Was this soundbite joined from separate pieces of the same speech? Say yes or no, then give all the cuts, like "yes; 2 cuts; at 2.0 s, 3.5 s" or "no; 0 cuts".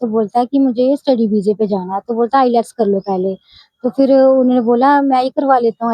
no; 0 cuts